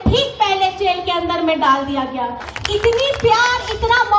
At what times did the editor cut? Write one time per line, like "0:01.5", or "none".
0:02.5